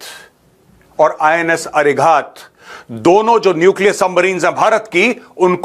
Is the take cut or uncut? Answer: uncut